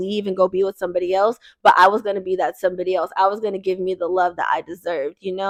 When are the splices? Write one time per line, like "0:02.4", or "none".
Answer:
none